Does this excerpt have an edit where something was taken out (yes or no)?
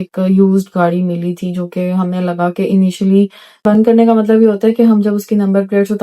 yes